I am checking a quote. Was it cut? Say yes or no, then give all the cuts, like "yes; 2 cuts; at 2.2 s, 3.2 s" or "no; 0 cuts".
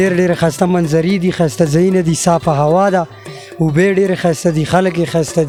no; 0 cuts